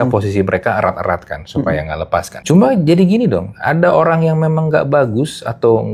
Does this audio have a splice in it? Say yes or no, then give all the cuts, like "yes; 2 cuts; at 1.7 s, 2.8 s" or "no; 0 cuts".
yes; 1 cut; at 2.3 s